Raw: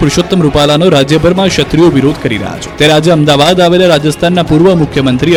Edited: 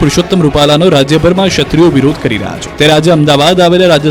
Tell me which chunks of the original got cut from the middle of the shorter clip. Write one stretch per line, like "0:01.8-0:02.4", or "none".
none